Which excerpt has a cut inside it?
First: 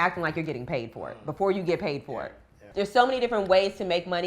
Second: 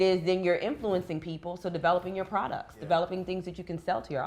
first; 1 cut; at 2.6 s

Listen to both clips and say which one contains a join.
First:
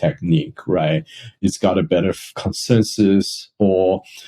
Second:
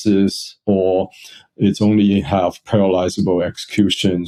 first; 1 cut; at 1.3 s

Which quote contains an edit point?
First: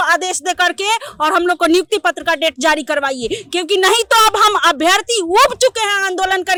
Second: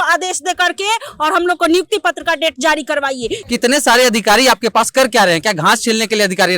second; 1 cut; at 3.4 s

